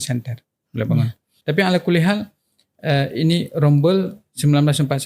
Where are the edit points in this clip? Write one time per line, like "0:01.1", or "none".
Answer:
0:01.3

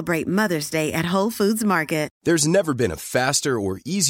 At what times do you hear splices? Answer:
0:02.1

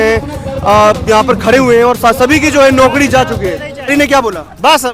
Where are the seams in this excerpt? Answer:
0:03.9

